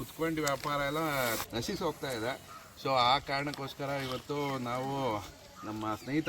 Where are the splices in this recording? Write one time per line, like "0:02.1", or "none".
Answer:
0:01.5